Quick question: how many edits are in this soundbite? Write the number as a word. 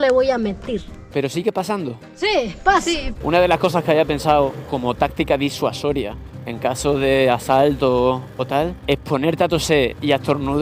two